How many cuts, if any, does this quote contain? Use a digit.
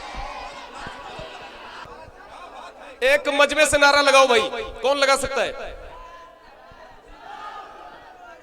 1